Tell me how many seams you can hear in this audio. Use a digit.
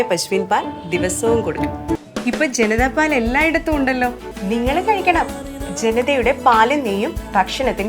2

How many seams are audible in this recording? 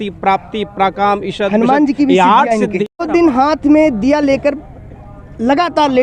1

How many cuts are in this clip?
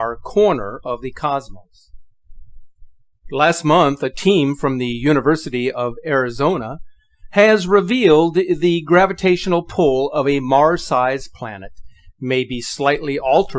1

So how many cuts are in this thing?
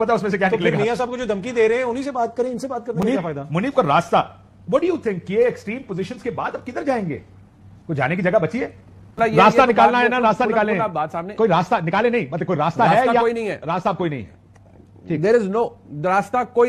0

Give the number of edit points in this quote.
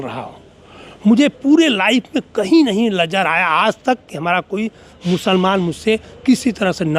0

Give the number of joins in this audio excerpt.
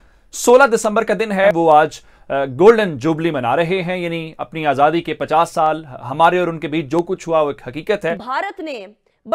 2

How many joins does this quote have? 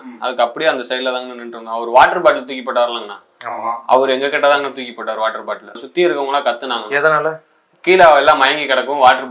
1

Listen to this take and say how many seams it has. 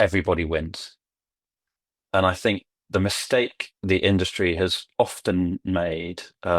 0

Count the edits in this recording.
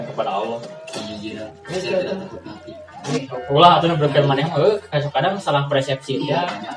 1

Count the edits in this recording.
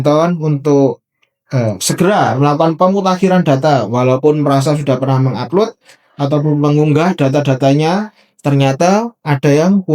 0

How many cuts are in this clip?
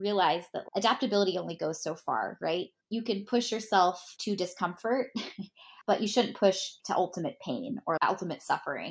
1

